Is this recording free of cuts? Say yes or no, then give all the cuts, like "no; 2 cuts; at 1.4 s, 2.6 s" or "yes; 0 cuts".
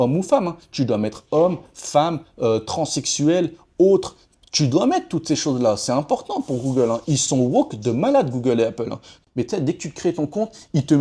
no; 1 cut; at 9.1 s